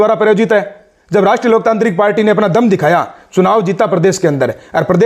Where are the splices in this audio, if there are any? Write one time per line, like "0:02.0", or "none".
none